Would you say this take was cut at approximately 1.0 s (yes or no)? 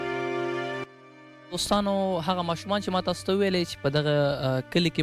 yes